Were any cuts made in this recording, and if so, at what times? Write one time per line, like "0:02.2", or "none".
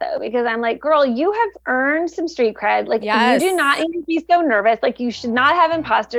0:01.6
0:05.0